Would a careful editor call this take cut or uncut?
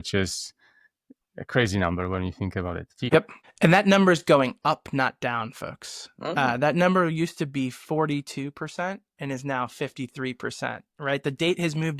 cut